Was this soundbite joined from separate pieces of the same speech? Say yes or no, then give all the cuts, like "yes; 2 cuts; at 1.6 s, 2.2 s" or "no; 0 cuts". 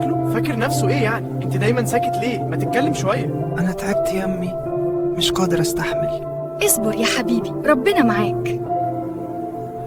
no; 0 cuts